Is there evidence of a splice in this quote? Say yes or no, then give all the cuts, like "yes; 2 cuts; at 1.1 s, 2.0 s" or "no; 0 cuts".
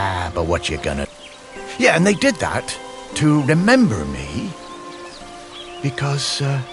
yes; 1 cut; at 1.1 s